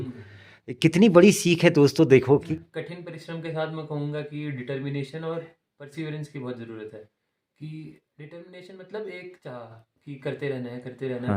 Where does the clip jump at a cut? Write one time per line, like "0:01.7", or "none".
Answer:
0:02.5

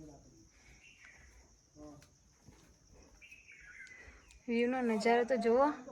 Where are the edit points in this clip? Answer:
none

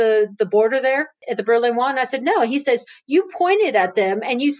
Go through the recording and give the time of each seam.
0:01.2

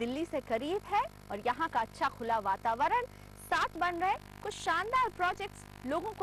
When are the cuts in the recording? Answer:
0:03.8

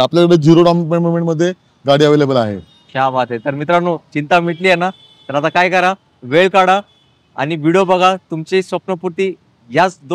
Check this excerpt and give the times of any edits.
none

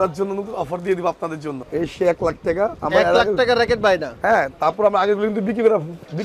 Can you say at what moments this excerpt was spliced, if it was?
0:01.6

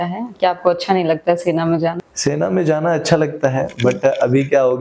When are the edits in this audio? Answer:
0:02.1

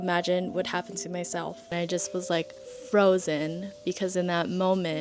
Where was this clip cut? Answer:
0:01.7

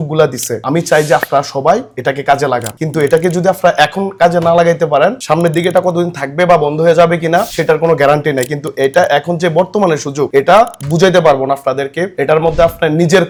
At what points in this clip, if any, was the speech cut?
none

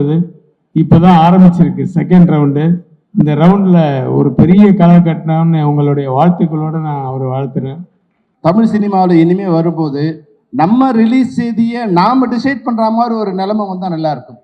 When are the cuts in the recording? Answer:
0:08.2

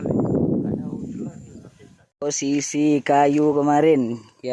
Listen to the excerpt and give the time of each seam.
0:02.0

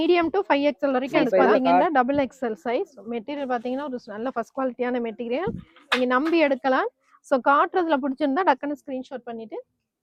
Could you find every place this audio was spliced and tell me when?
none

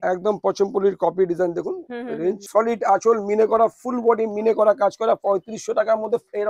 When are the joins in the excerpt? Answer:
0:02.4

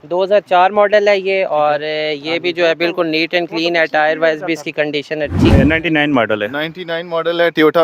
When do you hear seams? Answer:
0:05.5

